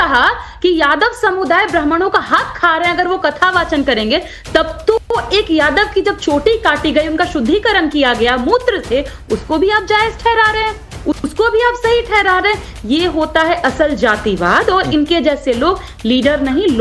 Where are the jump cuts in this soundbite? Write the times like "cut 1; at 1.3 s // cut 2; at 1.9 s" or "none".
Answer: cut 1; at 10.9 s